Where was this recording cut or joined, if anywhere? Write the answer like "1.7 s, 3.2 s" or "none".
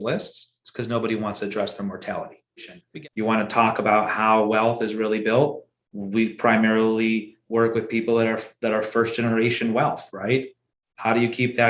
2.8 s